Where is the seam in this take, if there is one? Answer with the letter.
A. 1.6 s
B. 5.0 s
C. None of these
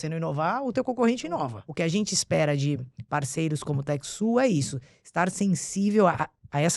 A